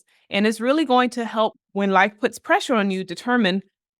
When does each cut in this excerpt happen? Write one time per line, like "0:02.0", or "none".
0:01.6